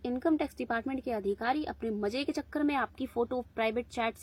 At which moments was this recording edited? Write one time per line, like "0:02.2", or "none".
none